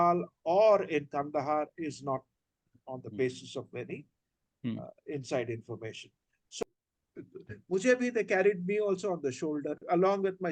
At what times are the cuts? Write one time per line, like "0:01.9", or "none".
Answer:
0:06.6